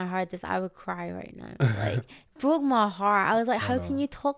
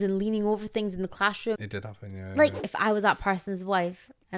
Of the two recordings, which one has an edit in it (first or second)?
second